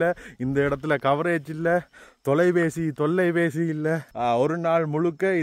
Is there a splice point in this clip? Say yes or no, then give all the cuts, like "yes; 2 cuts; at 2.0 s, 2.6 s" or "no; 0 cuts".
yes; 1 cut; at 4.1 s